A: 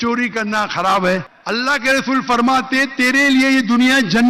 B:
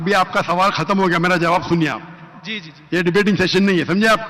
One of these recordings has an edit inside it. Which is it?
A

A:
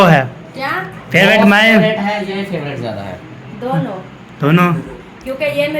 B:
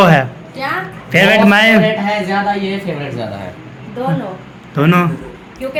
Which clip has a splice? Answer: A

